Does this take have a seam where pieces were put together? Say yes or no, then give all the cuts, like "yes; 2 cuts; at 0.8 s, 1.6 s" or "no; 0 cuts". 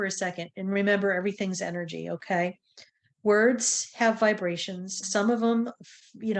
yes; 1 cut; at 5.0 s